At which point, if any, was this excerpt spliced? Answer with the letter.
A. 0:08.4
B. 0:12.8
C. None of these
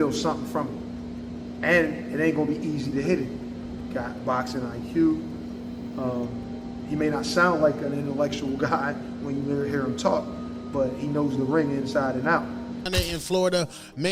B